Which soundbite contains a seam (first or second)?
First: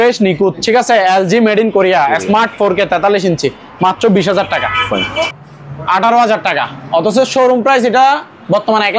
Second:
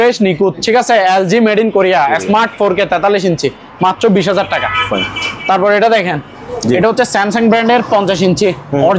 first